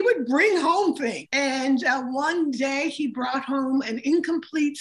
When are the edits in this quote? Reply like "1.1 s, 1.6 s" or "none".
1.2 s